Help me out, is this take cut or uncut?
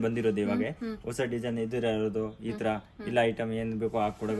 uncut